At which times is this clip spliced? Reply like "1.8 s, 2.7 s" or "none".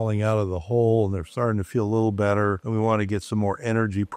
none